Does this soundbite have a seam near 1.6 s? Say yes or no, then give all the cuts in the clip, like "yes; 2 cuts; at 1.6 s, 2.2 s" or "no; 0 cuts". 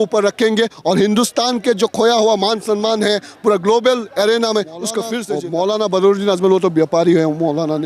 no; 1 cut; at 5.2 s